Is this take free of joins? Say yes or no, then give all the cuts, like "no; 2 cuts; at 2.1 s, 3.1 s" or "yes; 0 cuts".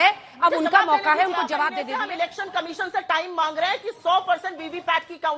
no; 1 cut; at 1.8 s